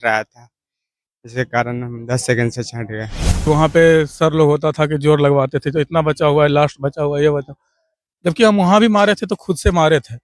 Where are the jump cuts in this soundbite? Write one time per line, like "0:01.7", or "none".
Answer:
0:03.4